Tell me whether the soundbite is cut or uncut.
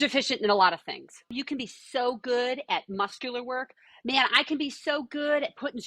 cut